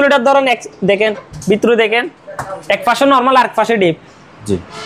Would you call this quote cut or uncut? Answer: uncut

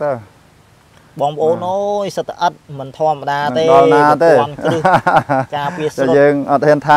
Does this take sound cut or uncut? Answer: uncut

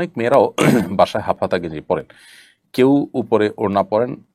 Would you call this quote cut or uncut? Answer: uncut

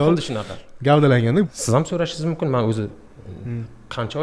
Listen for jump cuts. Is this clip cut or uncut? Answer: cut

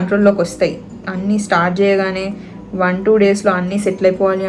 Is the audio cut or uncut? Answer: uncut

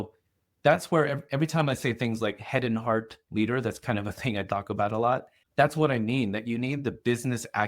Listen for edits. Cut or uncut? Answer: cut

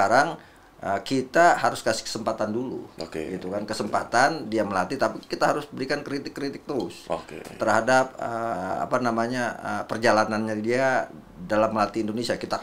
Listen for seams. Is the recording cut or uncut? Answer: uncut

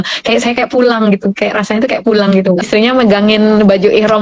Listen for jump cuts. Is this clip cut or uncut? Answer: cut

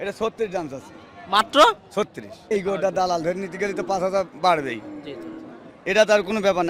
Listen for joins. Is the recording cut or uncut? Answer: cut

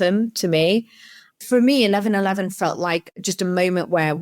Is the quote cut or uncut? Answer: cut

